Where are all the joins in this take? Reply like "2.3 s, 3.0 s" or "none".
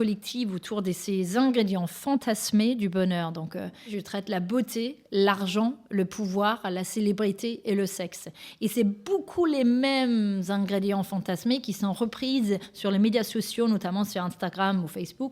4.0 s

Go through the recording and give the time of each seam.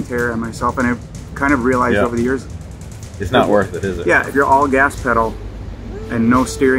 4.3 s

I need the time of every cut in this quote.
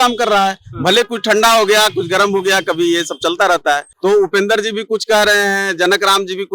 3.9 s

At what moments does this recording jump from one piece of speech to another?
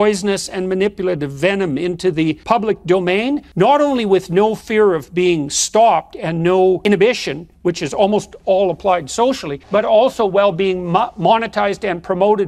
2.4 s, 3.5 s, 6.8 s, 9.5 s

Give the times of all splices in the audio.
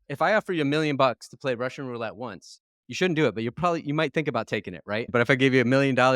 5.1 s

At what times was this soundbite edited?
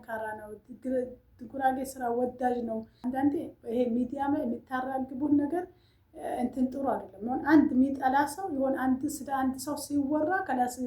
2.9 s

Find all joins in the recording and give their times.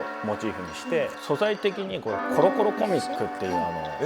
1.2 s

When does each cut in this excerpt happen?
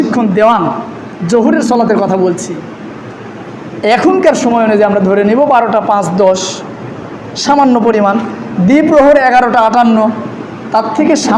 none

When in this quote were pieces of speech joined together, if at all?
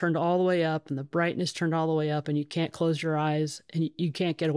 none

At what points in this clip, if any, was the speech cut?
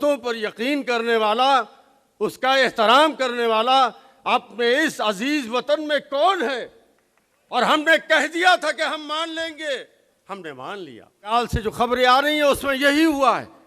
11.3 s

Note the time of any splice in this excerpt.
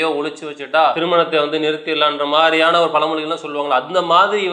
1.0 s

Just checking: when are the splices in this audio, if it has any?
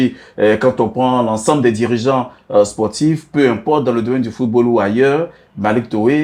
none

